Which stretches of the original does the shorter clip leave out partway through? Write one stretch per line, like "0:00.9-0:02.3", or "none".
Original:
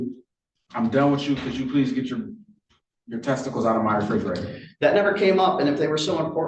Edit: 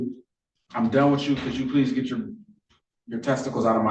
none